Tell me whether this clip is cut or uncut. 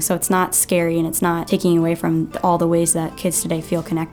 cut